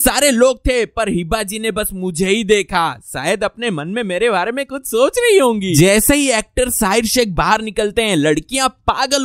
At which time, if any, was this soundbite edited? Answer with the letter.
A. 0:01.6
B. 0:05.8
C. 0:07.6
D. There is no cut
B